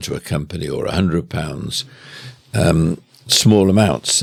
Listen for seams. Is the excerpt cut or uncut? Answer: uncut